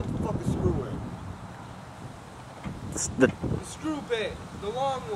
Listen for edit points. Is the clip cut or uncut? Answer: uncut